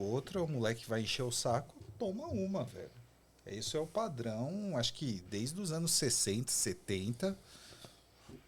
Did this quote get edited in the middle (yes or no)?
no